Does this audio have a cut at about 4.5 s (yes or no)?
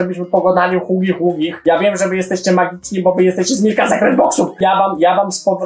no